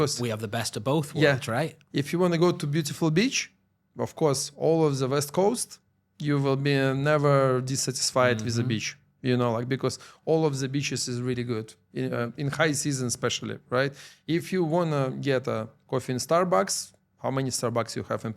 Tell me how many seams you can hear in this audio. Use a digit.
0